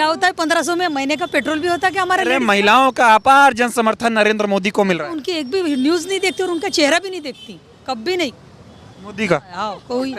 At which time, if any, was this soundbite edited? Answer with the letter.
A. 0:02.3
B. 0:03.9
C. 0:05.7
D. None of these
A